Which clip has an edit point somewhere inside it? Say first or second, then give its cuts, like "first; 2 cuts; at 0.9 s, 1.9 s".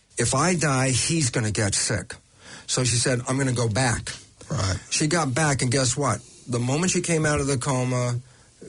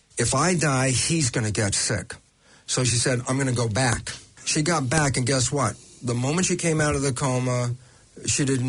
second; 1 cut; at 4.3 s